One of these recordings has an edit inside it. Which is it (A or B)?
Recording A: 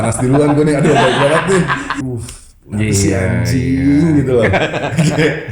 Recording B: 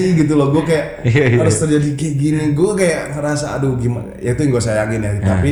A